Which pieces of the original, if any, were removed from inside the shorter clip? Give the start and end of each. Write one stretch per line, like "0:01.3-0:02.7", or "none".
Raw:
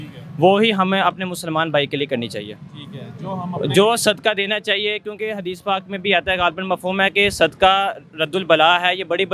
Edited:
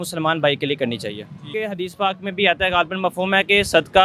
0:02.7-0:05.1